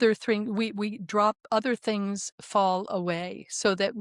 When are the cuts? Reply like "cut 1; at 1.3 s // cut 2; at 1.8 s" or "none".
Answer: none